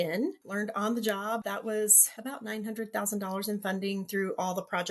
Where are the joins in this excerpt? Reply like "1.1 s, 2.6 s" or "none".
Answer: 1.5 s